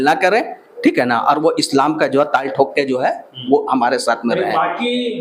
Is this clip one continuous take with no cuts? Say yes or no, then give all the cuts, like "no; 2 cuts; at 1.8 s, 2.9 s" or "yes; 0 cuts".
yes; 0 cuts